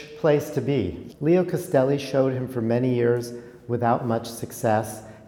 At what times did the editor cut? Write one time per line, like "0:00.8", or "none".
0:01.0